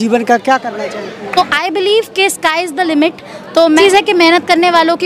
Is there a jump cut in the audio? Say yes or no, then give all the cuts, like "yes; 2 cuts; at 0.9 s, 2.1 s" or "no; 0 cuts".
yes; 2 cuts; at 1.2 s, 3.8 s